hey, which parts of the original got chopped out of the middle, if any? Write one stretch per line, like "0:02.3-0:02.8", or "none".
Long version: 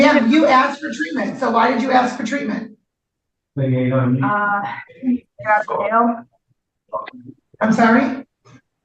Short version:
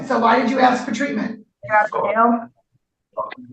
0:02.9-0:05.3